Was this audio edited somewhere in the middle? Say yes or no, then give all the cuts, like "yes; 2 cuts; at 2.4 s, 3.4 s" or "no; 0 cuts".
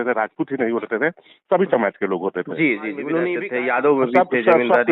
yes; 1 cut; at 3.4 s